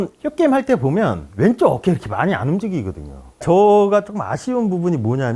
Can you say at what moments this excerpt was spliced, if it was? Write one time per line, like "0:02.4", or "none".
0:03.4